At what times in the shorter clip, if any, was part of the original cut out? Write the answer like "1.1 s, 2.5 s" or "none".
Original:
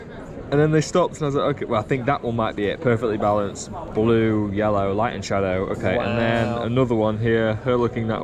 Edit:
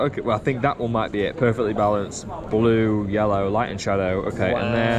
none